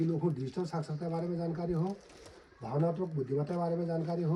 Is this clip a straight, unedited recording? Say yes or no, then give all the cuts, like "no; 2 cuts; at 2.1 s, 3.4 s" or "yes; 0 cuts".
yes; 0 cuts